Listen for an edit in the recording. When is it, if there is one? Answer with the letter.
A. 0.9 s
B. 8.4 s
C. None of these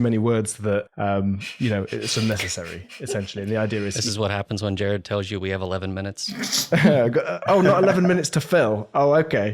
A